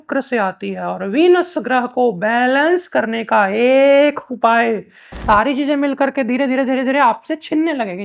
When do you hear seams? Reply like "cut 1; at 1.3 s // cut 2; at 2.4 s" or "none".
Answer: cut 1; at 5.2 s